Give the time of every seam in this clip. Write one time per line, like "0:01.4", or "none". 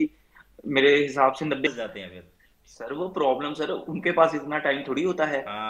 0:01.7